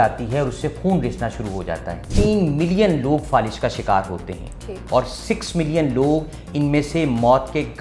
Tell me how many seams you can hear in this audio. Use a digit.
1